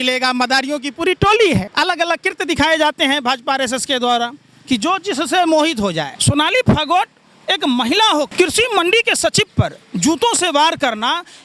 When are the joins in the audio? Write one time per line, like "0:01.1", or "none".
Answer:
0:01.7
0:06.1
0:08.3